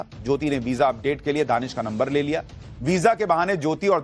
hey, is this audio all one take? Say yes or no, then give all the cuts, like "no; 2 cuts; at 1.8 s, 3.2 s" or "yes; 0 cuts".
yes; 0 cuts